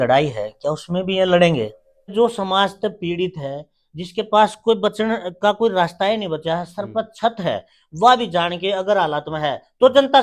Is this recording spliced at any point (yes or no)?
yes